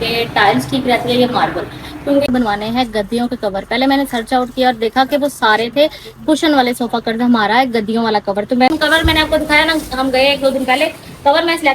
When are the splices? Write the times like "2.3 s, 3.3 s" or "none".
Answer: 2.3 s, 8.7 s